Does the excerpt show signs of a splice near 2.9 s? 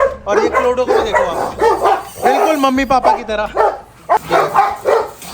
no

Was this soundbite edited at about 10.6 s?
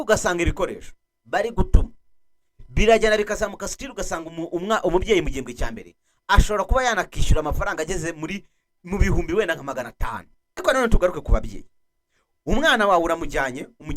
yes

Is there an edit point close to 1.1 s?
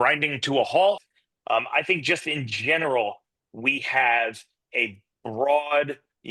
yes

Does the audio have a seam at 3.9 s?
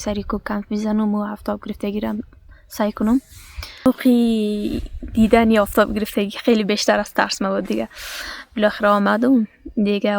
yes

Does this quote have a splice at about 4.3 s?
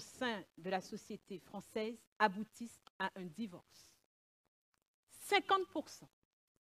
yes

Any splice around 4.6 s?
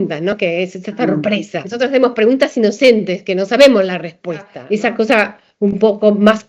yes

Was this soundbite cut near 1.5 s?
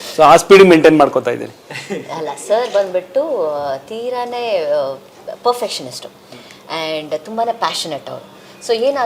no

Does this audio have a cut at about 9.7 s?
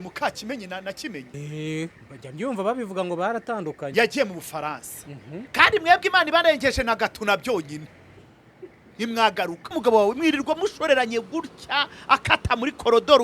yes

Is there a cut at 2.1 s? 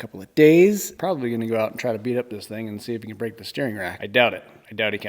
no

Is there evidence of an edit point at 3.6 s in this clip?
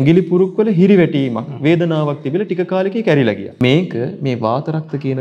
yes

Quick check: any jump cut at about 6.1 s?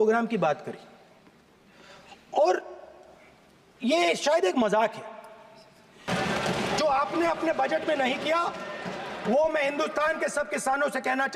yes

